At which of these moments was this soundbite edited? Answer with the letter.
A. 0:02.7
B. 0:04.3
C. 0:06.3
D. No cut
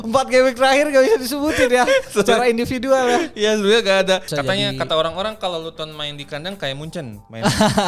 B